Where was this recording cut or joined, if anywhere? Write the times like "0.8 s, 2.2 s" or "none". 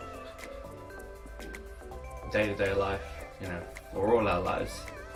none